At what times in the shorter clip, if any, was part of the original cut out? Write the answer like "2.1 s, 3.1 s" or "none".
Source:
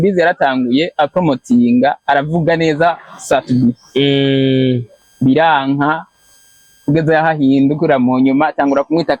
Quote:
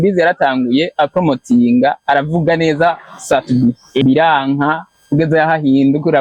4.0 s, 4.9 s